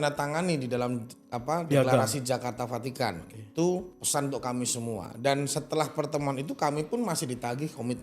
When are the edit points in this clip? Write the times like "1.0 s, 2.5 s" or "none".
4.0 s